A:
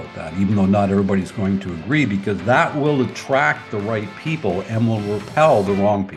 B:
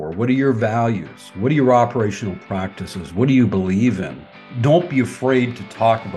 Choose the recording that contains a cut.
B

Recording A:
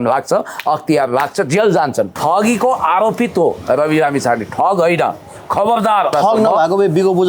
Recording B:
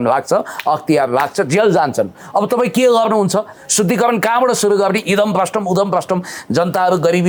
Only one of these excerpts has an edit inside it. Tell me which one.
A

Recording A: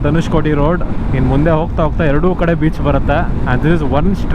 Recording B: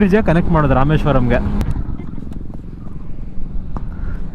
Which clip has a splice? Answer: B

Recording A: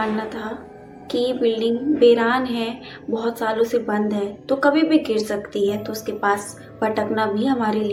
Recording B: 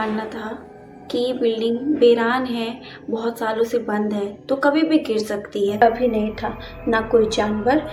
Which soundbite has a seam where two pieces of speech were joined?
B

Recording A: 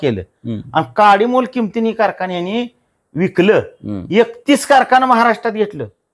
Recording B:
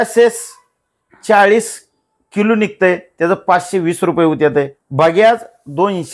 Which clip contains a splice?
B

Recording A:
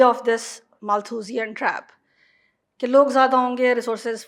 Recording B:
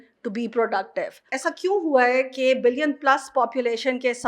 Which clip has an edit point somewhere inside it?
B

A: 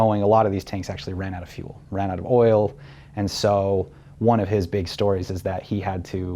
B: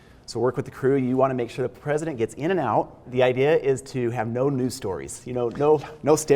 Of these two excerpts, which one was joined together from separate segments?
B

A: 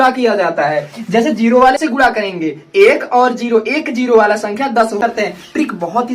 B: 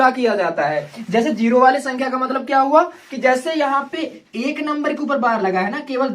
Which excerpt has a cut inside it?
A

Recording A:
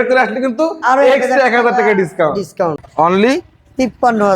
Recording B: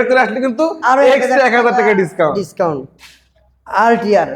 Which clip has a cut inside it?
A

